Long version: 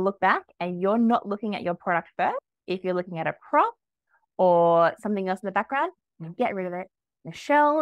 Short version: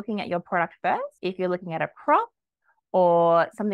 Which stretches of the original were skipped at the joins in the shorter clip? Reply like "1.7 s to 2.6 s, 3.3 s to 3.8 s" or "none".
2.5 s to 2.6 s